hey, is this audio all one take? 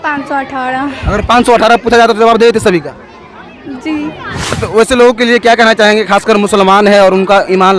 no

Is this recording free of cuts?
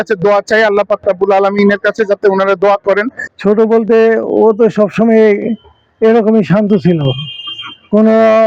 no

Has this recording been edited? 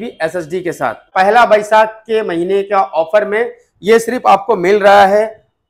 yes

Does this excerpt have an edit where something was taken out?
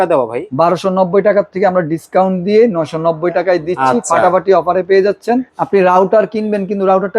yes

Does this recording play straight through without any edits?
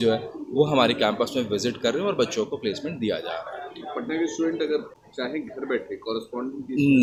yes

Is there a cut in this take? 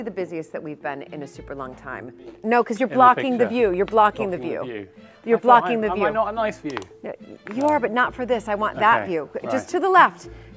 yes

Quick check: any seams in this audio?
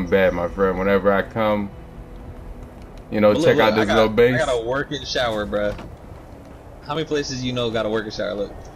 no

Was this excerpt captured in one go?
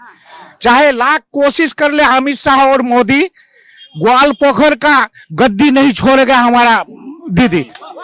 yes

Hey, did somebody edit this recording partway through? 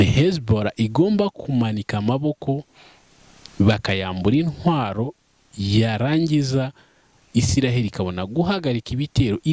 no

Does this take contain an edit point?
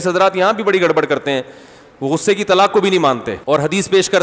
yes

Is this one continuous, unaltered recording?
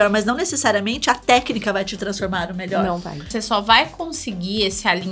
no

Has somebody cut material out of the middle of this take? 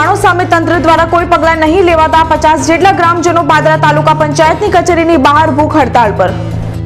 no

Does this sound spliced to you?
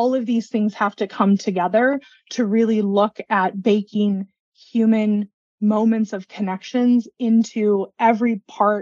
no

